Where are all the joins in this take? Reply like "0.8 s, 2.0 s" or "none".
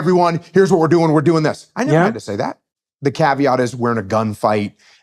2.6 s